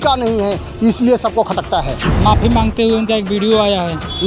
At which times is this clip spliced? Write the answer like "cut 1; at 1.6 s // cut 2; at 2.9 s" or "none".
cut 1; at 2.0 s